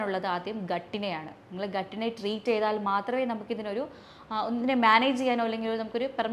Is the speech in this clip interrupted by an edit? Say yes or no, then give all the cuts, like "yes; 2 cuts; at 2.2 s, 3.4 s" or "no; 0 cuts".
no; 0 cuts